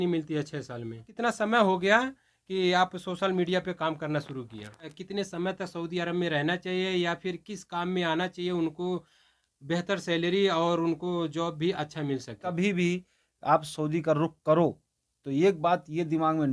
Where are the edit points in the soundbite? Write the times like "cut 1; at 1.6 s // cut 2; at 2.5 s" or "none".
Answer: cut 1; at 1.0 s // cut 2; at 5.0 s // cut 3; at 12.4 s